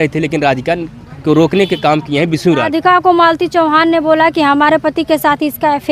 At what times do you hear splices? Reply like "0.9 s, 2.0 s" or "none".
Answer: 2.7 s